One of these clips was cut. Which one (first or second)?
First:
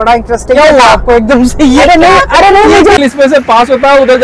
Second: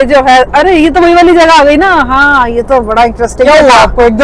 first